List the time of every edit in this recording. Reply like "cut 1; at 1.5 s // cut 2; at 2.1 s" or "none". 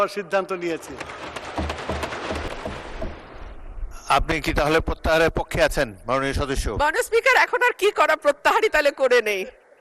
cut 1; at 2.5 s